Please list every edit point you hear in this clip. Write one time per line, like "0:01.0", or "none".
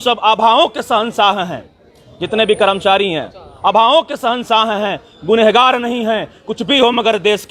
none